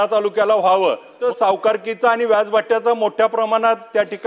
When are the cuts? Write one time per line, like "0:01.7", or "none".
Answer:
0:01.2

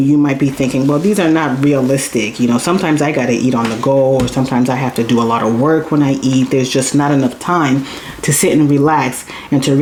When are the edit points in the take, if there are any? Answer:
none

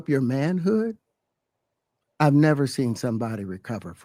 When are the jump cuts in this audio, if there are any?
none

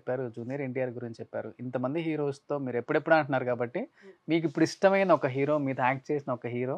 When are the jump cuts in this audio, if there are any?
none

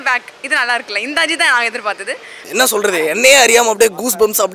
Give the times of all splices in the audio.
0:02.4

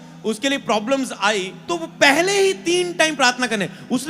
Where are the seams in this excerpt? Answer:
0:01.6

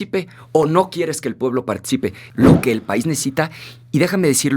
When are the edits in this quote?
0:02.2

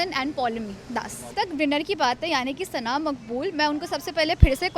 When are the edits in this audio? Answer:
0:01.3

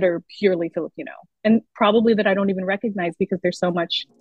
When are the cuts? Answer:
none

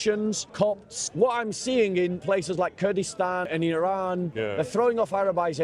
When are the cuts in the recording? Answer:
0:00.8
0:02.2
0:03.5
0:04.3

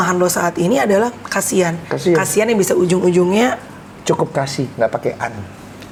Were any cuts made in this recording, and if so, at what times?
none

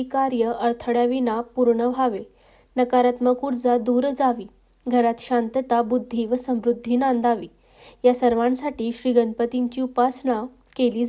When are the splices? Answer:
none

